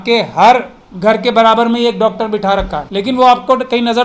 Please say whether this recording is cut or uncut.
cut